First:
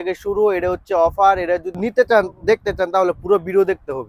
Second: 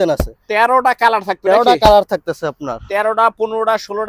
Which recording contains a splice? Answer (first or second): first